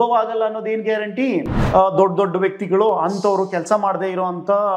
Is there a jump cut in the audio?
yes; 1 cut; at 1.6 s

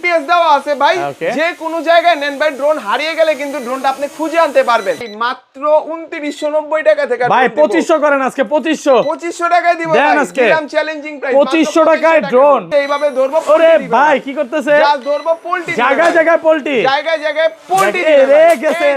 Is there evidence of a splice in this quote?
yes; 2 cuts; at 5.0 s, 12.7 s

